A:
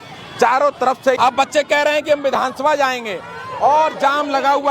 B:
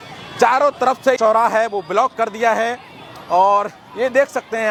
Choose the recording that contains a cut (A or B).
A